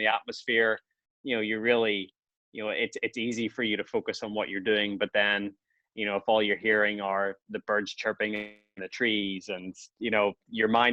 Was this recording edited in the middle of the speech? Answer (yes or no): no